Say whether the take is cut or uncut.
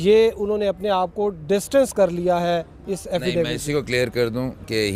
uncut